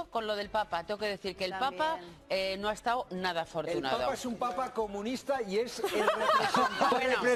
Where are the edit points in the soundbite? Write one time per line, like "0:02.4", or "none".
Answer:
none

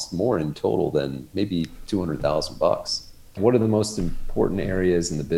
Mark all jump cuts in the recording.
0:03.3

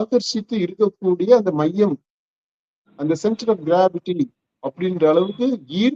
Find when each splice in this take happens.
none

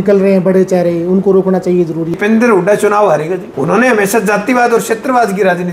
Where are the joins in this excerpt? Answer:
0:02.2
0:03.5

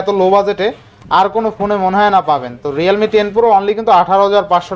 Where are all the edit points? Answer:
none

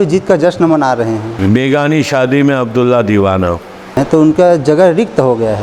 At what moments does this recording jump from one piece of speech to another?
0:01.3
0:04.0

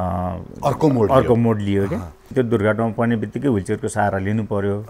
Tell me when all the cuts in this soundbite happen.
0:02.3

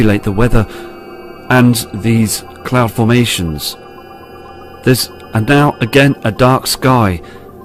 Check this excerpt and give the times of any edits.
none

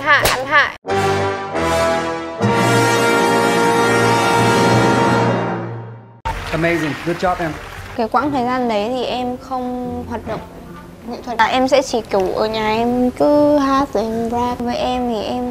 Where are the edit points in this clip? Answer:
0:07.9
0:11.3
0:14.6

